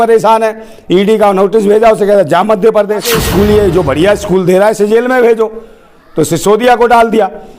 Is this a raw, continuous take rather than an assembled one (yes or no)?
no